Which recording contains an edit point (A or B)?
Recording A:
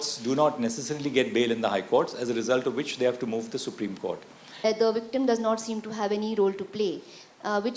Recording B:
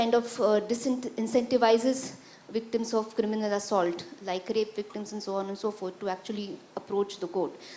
A